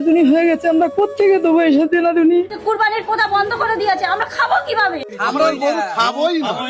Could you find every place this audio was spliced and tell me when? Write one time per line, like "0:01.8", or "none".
0:02.5